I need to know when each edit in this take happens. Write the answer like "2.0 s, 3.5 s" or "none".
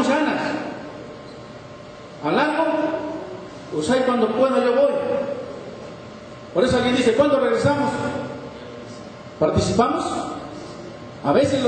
4.5 s